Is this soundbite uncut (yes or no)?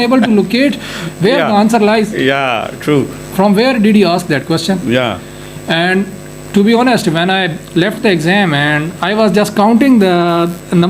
yes